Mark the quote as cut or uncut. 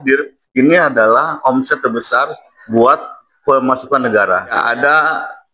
cut